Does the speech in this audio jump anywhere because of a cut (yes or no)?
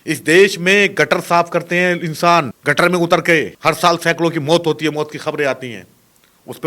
yes